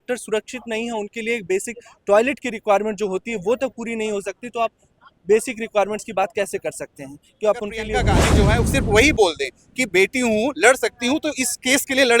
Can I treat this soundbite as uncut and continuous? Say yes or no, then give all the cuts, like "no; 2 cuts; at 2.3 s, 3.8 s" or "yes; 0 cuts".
no; 1 cut; at 8.2 s